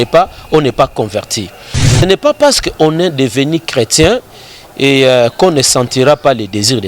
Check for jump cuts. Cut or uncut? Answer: cut